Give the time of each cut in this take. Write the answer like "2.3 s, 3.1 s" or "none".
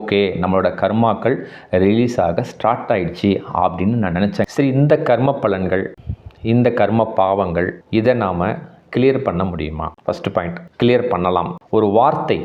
4.5 s, 11.5 s